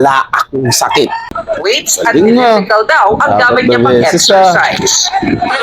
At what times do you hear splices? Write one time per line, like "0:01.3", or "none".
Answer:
0:01.4